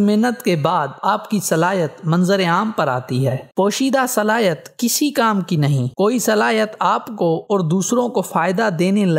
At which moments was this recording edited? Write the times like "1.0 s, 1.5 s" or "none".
none